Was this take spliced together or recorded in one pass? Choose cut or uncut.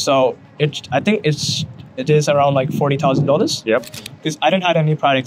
cut